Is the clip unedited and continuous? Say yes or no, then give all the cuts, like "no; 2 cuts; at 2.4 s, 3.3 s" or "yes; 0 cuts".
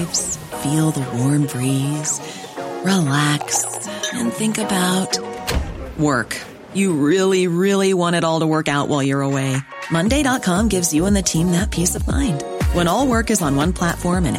yes; 0 cuts